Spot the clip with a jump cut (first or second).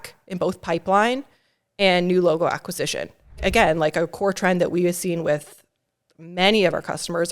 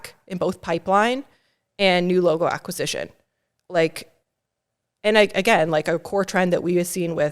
first